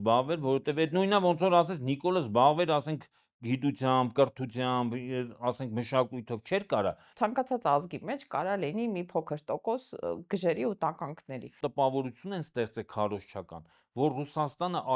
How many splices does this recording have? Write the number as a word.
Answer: two